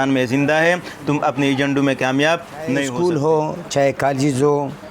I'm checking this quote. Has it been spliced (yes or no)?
yes